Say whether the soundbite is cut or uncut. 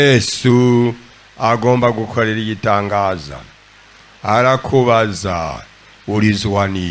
uncut